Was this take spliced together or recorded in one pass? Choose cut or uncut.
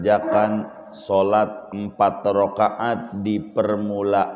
uncut